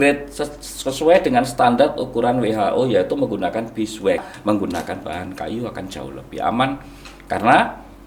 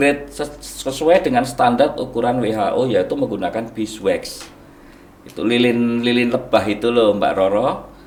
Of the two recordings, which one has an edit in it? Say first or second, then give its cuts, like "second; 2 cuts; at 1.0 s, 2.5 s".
first; 1 cut; at 4.3 s